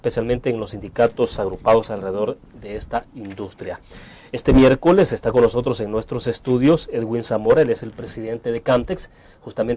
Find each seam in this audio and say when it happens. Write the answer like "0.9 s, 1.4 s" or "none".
4.4 s